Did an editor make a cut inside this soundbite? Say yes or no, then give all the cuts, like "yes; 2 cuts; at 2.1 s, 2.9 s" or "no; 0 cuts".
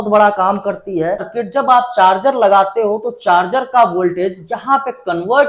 yes; 1 cut; at 1.4 s